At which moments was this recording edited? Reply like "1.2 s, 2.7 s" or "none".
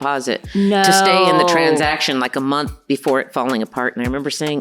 none